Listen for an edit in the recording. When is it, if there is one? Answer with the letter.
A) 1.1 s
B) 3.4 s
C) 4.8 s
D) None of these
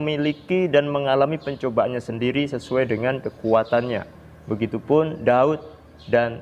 D